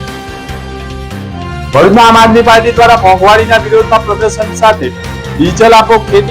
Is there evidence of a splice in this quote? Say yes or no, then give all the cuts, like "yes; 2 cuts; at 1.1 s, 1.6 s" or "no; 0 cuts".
yes; 1 cut; at 1.3 s